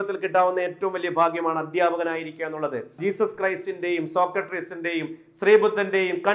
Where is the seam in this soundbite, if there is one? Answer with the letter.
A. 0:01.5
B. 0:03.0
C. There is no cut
B